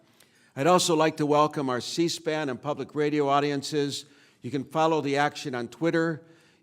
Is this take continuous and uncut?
no; 1 cut; at 3.6 s

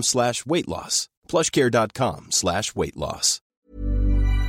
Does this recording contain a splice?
no; 0 cuts

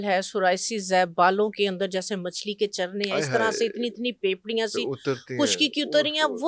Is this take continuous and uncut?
yes; 0 cuts

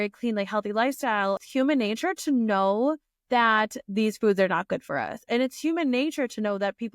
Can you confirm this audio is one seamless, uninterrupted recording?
no; 1 cut; at 1.4 s

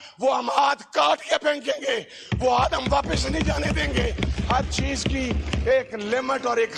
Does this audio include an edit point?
no; 0 cuts

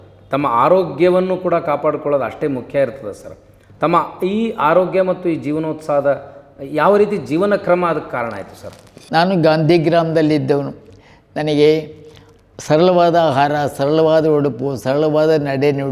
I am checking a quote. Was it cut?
yes; 1 cut; at 8.9 s

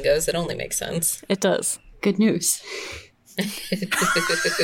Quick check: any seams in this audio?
yes; 1 cut; at 1.8 s

